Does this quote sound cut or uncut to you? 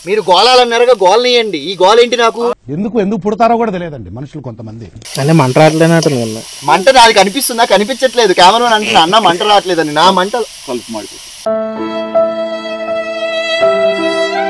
cut